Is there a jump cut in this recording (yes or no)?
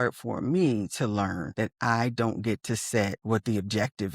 yes